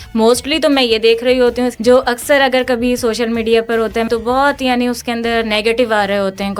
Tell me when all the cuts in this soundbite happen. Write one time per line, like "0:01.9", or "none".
0:01.7
0:04.1

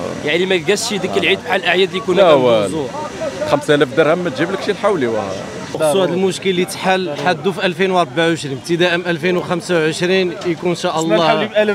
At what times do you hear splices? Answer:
0:05.8

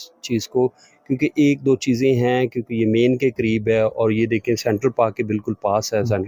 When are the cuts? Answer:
none

